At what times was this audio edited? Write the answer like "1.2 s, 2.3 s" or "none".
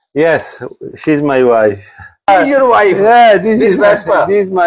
2.3 s